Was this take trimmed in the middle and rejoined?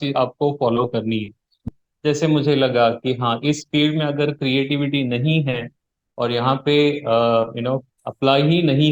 yes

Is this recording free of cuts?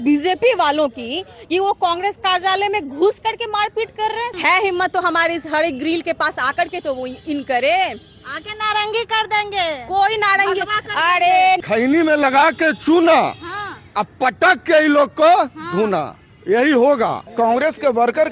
no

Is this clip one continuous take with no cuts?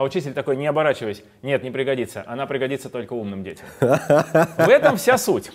yes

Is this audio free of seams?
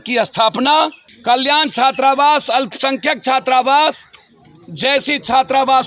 no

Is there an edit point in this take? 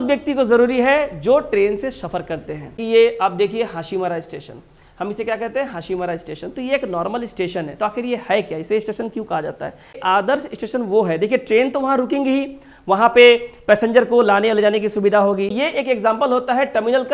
yes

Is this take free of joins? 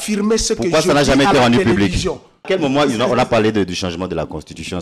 no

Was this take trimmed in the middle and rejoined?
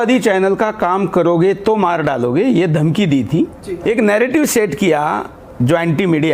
yes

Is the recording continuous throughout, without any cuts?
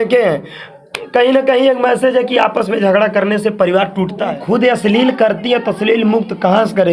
no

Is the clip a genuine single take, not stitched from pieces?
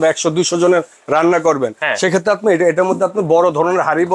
yes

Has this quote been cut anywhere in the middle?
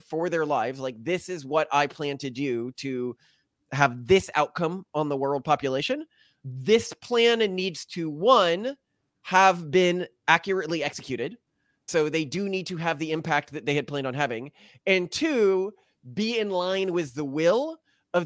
no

